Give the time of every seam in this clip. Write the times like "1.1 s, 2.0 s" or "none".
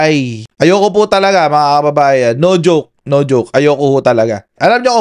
none